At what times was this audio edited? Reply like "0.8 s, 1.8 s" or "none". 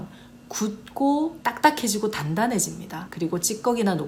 none